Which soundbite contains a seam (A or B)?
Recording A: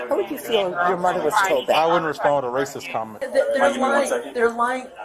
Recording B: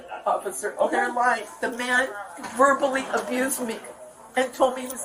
A